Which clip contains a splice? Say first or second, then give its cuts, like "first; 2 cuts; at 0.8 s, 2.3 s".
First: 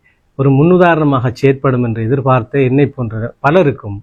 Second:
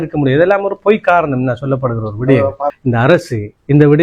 second; 1 cut; at 2.8 s